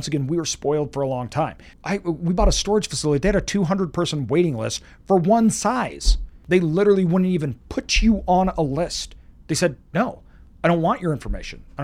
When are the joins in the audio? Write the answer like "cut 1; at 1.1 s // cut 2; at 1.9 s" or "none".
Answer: cut 1; at 1.7 s // cut 2; at 6.3 s